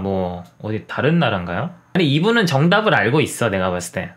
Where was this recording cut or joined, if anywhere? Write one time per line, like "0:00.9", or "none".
0:01.8

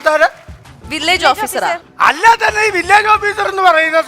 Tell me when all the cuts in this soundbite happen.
0:01.9

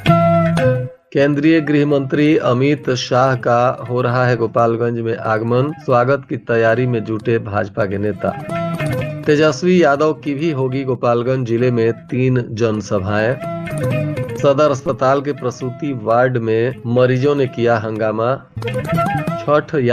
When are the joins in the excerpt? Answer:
0:00.9

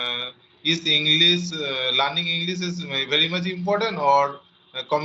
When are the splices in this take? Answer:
none

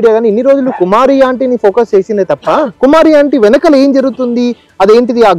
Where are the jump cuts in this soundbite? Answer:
0:02.4

